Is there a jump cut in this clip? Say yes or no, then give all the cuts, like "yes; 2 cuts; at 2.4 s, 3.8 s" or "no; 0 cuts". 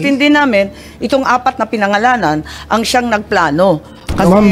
no; 0 cuts